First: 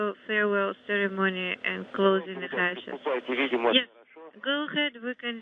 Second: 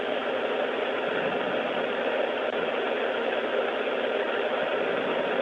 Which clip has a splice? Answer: second; 1 cut; at 0.9 s

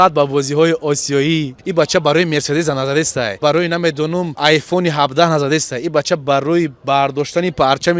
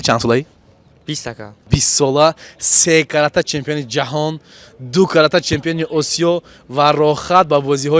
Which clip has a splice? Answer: first; 3 cuts; at 1.6 s, 3.4 s, 4.4 s

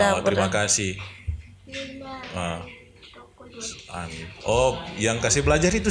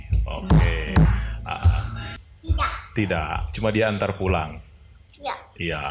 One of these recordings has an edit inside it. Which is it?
second; 1 cut; at 2.1 s

